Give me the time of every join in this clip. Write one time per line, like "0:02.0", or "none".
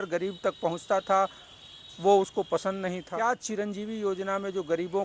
0:03.1